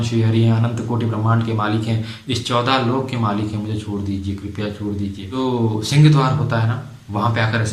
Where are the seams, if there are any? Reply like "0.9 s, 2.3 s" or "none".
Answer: 5.4 s